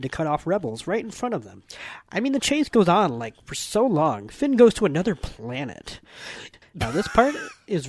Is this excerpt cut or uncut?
cut